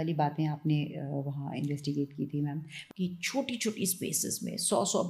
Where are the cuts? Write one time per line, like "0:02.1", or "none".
0:02.7